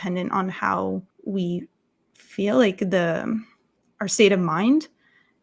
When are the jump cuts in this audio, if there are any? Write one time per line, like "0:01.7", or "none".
0:01.1